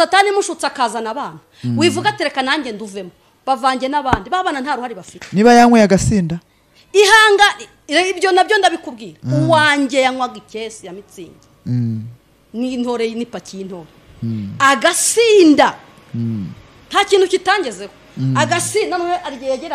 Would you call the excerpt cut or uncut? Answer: uncut